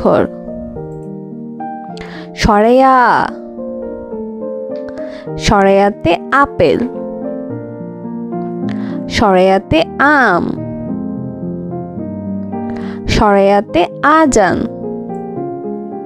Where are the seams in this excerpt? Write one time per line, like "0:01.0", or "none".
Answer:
0:03.4
0:05.2
0:06.9
0:09.0
0:10.6
0:12.5